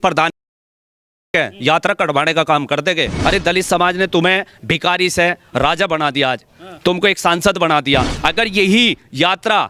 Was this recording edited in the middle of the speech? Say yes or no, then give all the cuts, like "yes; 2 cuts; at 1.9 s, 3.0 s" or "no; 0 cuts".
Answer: yes; 2 cuts; at 3.1 s, 8.1 s